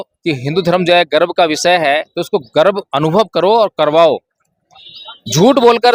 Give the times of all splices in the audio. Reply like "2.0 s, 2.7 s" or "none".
none